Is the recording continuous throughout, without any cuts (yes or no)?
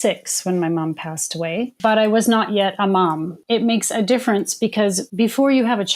no